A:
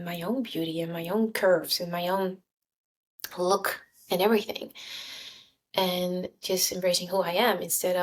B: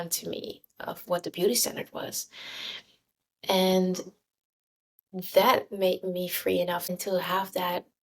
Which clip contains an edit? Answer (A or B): B